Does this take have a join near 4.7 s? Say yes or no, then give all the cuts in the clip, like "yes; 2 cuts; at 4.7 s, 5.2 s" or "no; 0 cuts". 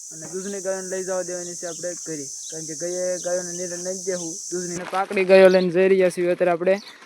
yes; 1 cut; at 4.7 s